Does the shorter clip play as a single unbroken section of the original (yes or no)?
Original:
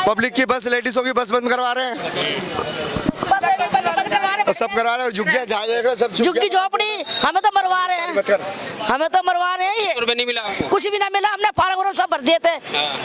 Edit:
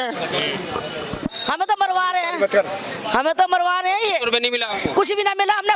no